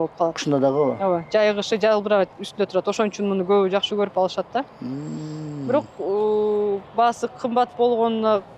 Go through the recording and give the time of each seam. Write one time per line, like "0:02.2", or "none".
none